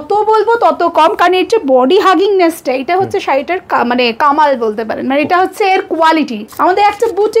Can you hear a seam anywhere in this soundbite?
yes; 1 cut; at 6.4 s

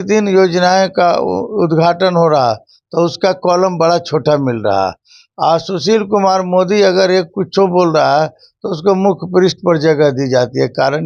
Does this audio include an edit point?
no; 0 cuts

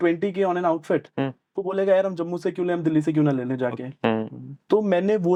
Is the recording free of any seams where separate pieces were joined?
yes; 0 cuts

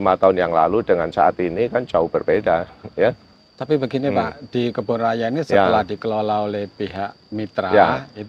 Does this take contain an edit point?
no; 0 cuts

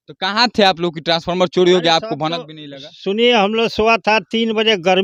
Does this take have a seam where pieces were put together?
no; 0 cuts

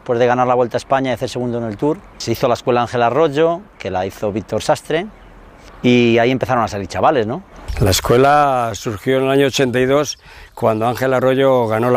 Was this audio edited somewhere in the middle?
no; 0 cuts

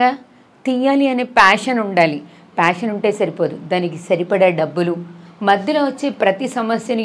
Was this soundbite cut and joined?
no; 0 cuts

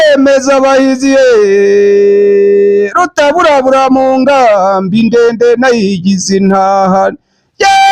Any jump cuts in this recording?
no; 0 cuts

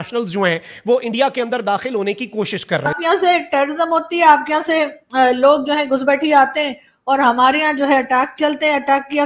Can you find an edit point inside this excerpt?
yes; 1 cut; at 2.9 s

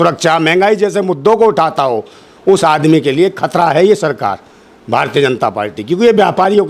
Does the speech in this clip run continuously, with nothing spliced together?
yes; 0 cuts

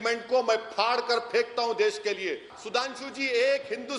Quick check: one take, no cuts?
no; 1 cut; at 2.5 s

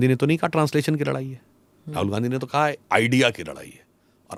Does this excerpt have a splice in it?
no; 0 cuts

